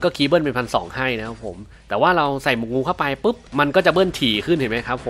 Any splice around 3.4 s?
yes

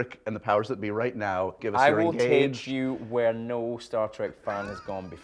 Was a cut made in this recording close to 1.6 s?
yes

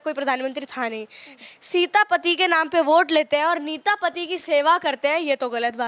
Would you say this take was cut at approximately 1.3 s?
yes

